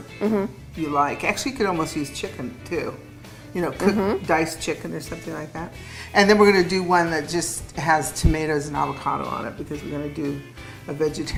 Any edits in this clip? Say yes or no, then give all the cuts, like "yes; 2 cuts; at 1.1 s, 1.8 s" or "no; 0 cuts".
no; 0 cuts